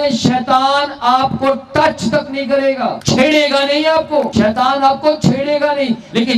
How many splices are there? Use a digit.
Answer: 2